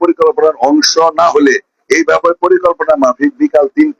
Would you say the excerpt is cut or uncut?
uncut